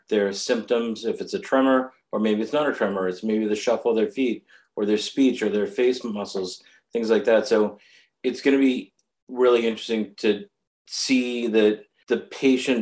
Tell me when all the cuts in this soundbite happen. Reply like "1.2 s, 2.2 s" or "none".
11.9 s